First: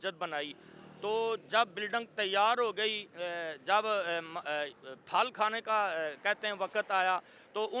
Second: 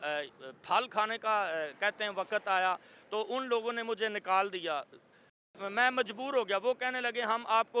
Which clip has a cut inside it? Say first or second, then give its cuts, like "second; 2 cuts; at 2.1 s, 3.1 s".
second; 1 cut; at 5.5 s